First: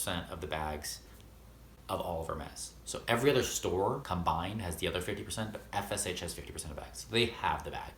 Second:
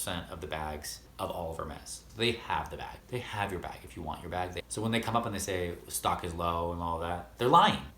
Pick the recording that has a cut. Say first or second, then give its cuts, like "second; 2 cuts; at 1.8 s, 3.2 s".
second; 3 cuts; at 1.0 s, 2.0 s, 4.6 s